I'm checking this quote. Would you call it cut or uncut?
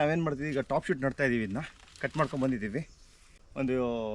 uncut